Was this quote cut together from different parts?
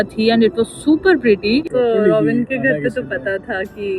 yes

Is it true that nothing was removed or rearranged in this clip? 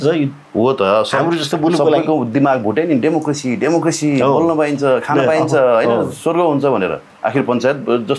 no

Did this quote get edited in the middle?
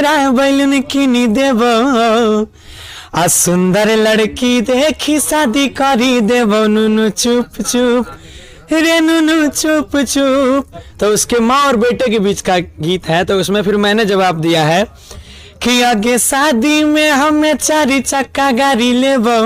no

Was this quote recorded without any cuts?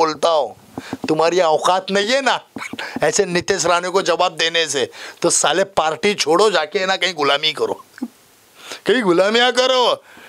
yes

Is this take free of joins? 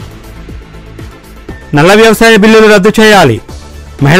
no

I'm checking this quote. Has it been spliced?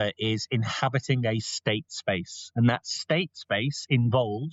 no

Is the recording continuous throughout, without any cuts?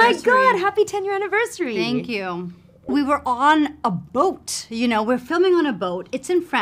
no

